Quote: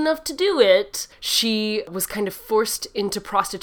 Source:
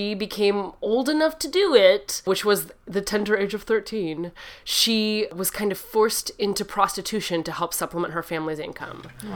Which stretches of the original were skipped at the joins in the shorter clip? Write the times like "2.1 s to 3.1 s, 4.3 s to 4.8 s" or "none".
2.1 s to 4.4 s